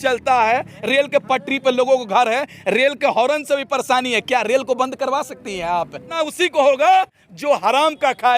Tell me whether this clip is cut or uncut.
cut